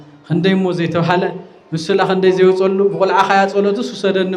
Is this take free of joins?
yes; 0 cuts

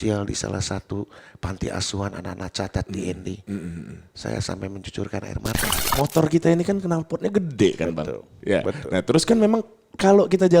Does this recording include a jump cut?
yes; 1 cut; at 5.8 s

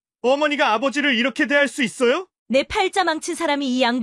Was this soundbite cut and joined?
yes; 1 cut; at 2.3 s

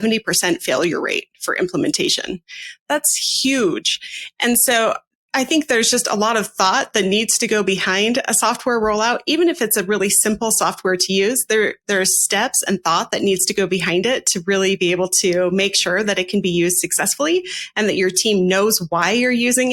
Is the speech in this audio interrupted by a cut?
no; 0 cuts

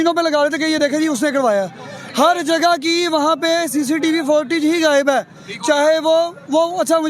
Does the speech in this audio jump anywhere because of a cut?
no; 0 cuts

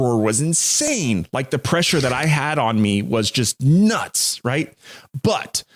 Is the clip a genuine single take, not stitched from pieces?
yes; 0 cuts

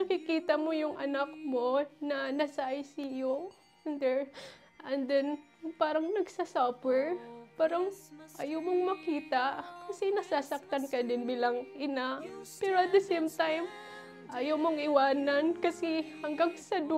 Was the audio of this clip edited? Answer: no; 0 cuts

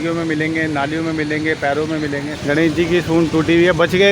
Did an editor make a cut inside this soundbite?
yes; 1 cut; at 2.3 s

